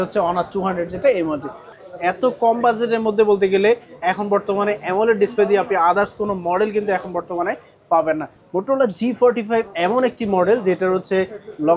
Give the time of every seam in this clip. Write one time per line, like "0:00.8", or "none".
0:01.7
0:08.3